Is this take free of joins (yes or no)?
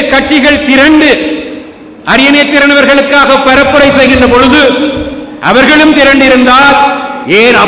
yes